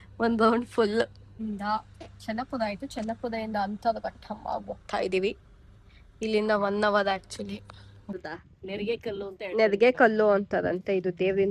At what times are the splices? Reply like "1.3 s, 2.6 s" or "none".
1.4 s, 8.2 s